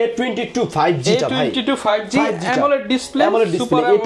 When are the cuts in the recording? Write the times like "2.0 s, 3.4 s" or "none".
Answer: none